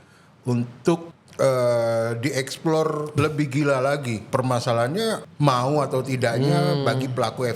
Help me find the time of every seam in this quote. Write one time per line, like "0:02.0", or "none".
0:01.2
0:03.1
0:04.2
0:05.2